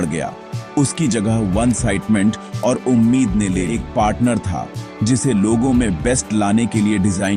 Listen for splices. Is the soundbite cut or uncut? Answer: cut